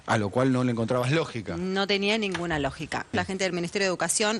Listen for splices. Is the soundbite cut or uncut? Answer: cut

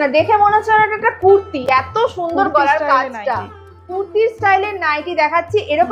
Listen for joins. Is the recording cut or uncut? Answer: uncut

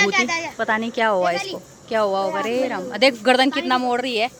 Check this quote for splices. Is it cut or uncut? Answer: uncut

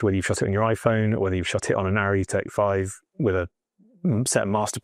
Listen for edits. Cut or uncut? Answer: uncut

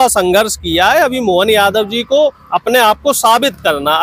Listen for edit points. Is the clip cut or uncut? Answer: uncut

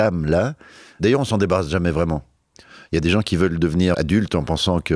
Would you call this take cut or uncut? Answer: cut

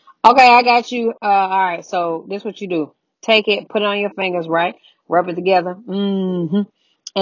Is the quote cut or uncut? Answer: uncut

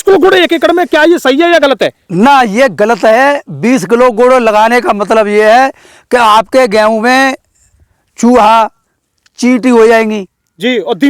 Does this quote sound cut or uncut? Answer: uncut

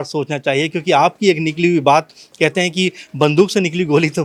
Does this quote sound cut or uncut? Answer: uncut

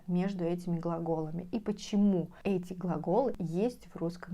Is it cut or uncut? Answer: cut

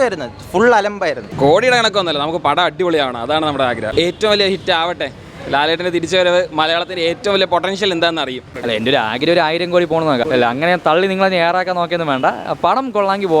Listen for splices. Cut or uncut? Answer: cut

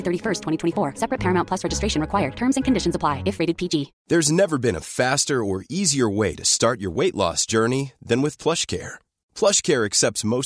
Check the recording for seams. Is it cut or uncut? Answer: cut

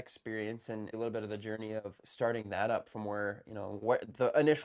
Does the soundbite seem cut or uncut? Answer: cut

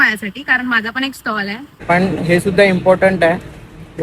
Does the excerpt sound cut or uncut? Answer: cut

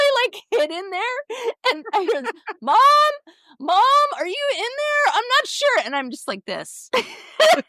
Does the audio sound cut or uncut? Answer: uncut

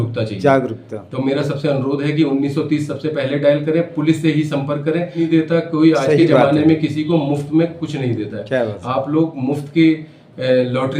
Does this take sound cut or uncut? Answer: cut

